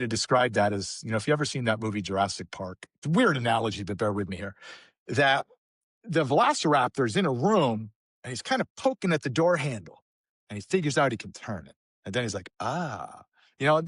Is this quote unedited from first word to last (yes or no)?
no